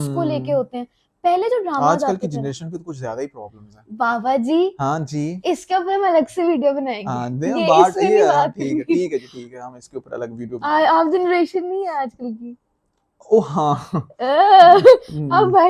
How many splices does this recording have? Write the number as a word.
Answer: zero